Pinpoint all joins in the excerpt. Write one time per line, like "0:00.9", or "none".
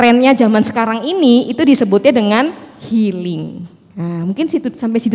none